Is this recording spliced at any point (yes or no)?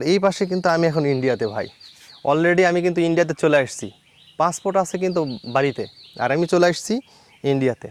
no